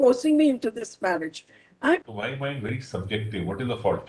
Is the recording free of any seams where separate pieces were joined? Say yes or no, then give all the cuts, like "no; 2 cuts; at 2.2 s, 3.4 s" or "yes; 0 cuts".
no; 1 cut; at 2.0 s